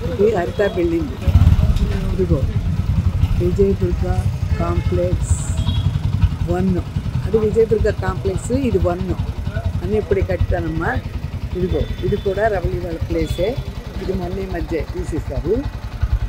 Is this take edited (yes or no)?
no